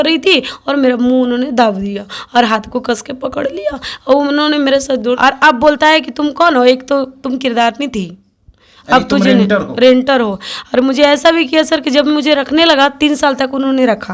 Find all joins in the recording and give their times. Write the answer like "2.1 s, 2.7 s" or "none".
5.2 s